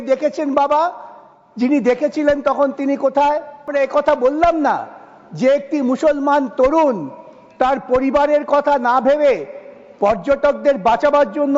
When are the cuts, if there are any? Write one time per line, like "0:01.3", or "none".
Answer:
0:03.7

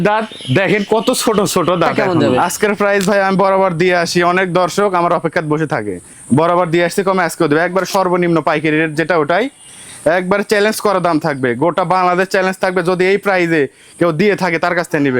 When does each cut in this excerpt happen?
0:02.0
0:06.1

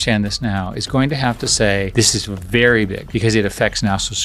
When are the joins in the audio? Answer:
0:03.0

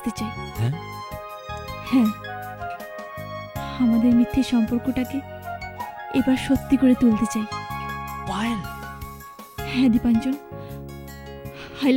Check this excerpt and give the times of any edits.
none

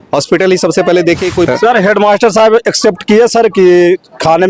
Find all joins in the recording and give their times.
0:01.5

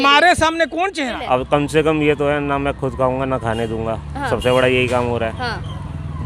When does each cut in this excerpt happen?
0:01.1

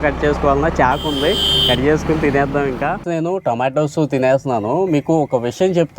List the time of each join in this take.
0:03.0

